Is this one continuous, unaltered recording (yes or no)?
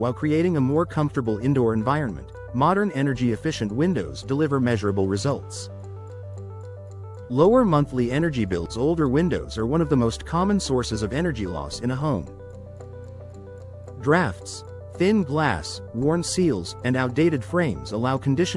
yes